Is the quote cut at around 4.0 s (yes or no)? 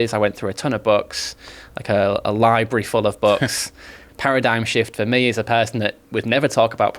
yes